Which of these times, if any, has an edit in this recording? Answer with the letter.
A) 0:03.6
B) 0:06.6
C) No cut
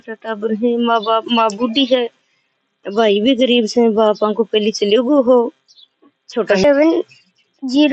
B